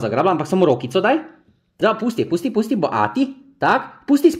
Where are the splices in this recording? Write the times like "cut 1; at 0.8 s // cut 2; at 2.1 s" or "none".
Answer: cut 1; at 1.6 s